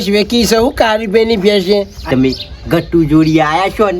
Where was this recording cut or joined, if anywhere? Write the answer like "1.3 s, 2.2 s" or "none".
2.1 s